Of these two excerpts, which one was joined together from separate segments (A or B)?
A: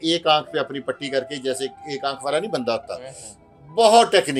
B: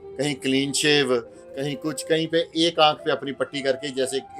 B